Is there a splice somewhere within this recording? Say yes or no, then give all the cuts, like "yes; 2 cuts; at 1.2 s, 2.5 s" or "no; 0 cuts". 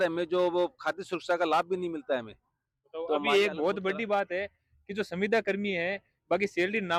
no; 0 cuts